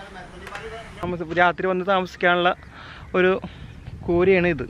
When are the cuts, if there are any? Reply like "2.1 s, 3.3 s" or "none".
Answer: 1.0 s